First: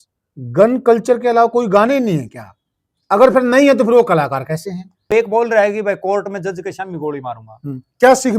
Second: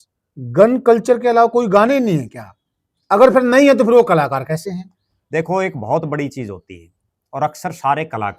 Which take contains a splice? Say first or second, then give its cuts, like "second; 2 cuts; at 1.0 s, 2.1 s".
first; 1 cut; at 5.1 s